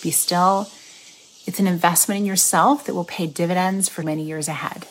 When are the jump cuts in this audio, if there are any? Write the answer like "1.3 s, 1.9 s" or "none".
4.0 s